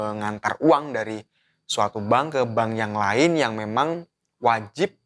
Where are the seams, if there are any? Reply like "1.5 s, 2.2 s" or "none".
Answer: none